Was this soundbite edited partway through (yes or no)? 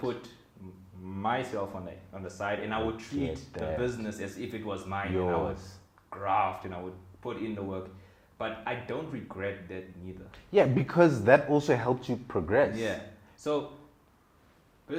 no